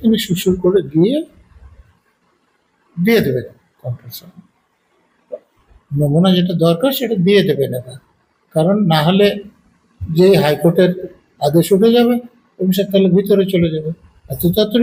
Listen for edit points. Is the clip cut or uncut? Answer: uncut